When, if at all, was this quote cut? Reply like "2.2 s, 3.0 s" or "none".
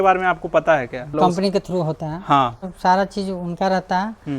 1.1 s, 2.7 s